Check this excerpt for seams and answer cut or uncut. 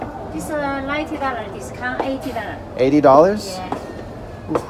uncut